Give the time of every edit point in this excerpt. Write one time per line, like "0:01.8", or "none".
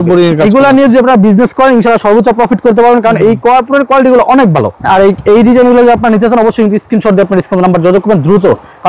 0:04.8